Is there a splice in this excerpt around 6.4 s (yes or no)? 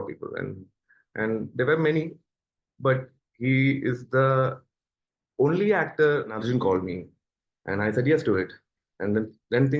yes